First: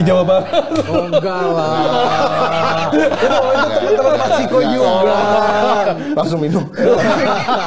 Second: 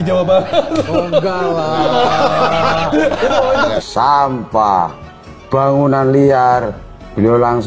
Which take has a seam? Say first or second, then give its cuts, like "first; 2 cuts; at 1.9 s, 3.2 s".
second; 1 cut; at 3.8 s